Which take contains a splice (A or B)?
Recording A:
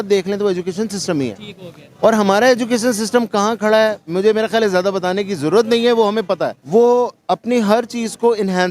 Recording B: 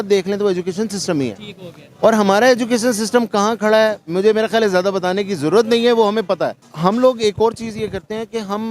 B